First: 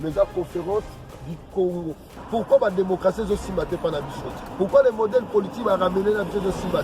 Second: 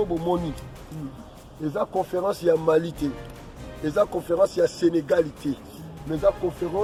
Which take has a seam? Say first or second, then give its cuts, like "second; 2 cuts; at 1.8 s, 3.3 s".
first; 1 cut; at 2.1 s